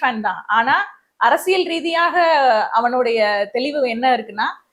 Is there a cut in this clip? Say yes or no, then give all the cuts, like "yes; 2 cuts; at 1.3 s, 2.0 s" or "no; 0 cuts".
no; 0 cuts